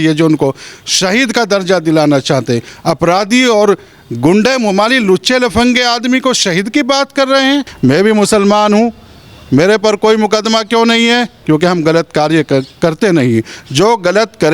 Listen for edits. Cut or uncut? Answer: cut